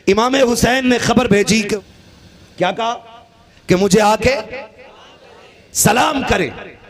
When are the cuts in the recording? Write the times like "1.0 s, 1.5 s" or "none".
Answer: 1.8 s

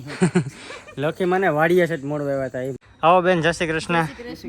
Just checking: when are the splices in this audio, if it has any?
2.8 s

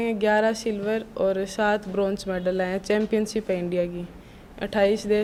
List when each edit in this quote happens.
none

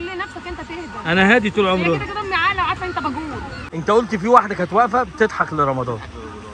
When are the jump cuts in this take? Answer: 3.5 s

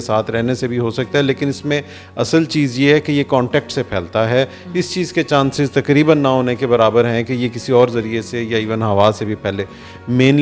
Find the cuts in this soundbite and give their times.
none

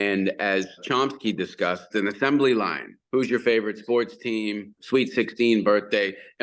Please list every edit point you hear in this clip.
0.8 s, 1.9 s, 2.9 s, 4.7 s

